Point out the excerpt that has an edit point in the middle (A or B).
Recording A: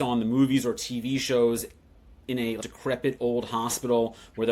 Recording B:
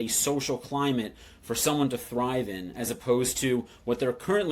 A